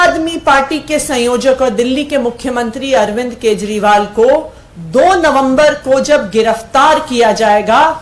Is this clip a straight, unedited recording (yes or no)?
yes